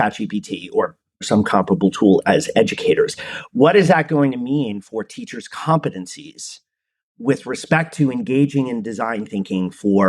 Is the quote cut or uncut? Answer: cut